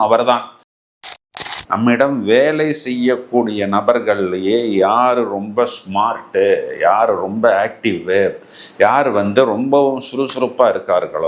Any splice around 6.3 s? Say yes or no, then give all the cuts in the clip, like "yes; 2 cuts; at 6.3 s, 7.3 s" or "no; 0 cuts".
no; 1 cut; at 1.0 s